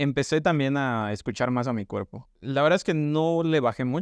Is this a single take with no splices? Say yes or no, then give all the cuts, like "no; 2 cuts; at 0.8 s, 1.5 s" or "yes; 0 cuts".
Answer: no; 1 cut; at 2.3 s